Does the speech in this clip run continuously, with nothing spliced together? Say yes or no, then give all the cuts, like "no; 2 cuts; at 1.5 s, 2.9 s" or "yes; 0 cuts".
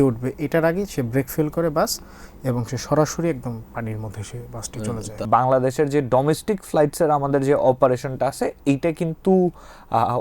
no; 1 cut; at 5.2 s